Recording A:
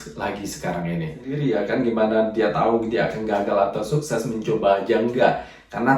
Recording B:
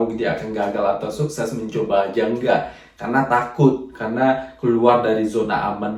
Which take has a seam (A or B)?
A